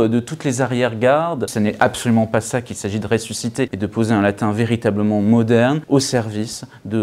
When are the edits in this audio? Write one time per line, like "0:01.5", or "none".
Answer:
0:01.5
0:03.8
0:05.8